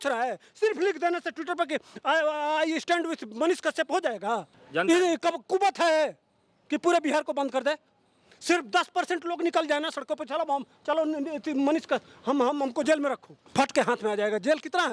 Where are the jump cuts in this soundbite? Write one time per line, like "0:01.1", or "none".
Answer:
0:04.6
0:13.4